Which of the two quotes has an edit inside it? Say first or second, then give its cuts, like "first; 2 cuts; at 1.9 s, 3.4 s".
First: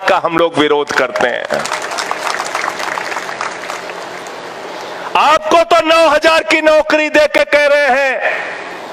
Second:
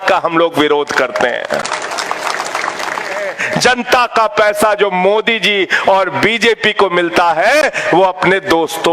second; 1 cut; at 3.3 s